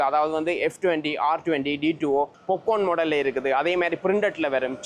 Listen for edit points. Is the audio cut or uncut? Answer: cut